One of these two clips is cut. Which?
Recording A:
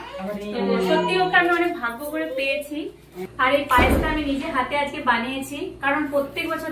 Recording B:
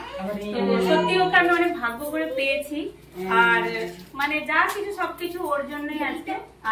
A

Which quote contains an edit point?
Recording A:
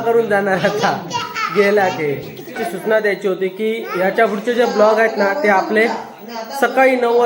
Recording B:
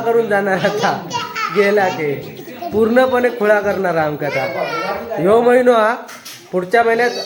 A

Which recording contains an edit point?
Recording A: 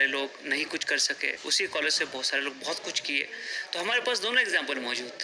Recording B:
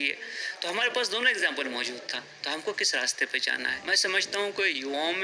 B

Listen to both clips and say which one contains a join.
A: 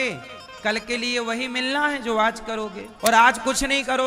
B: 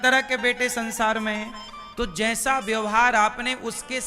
A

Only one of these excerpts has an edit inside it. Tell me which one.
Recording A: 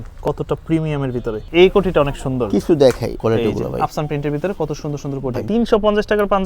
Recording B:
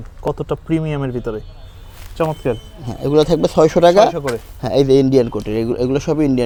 A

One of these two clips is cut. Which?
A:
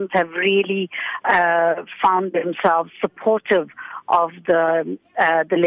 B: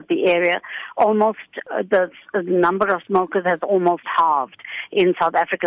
B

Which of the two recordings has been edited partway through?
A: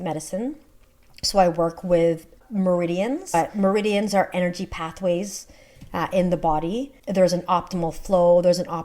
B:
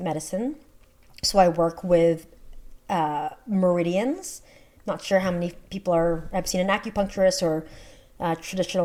A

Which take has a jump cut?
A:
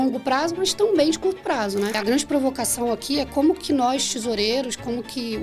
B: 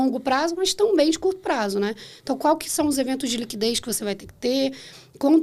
A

